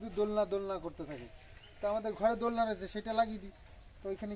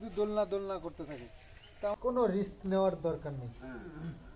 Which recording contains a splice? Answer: second; 1 cut; at 1.9 s

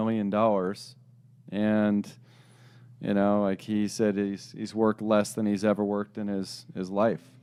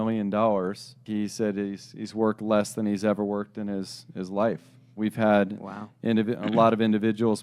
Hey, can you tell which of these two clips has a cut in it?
second; 2 cuts; at 1.0 s, 5.0 s

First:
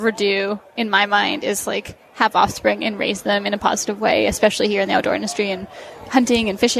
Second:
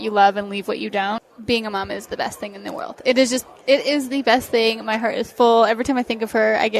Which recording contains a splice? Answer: second; 1 cut; at 1.2 s

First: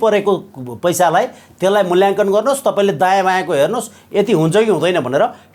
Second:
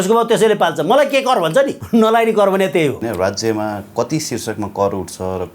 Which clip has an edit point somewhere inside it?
second; 2 cuts; at 1.8 s, 3.0 s

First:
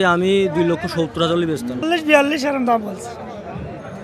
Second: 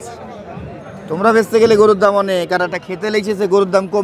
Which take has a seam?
first; 1 cut; at 1.9 s

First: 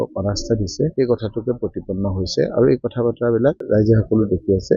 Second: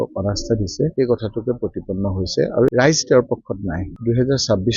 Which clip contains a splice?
second; 2 cuts; at 2.7 s, 4.0 s

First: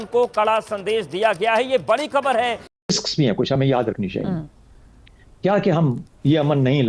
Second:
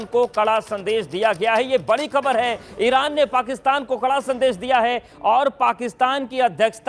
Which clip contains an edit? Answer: first; 1 cut; at 2.7 s

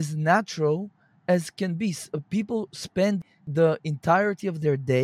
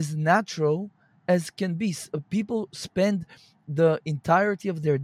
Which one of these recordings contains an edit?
first; 1 cut; at 3.4 s

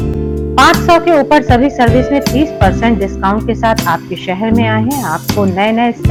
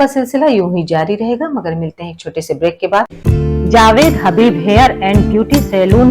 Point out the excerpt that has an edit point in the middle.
second; 1 cut; at 3.2 s

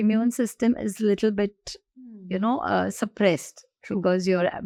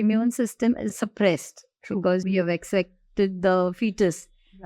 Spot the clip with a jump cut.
second; 2 cuts; at 0.9 s, 2.2 s

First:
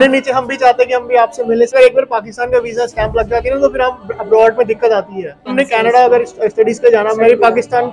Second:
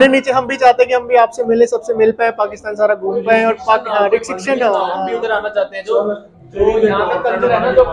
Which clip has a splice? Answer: first; 2 cuts; at 1.7 s, 5.5 s

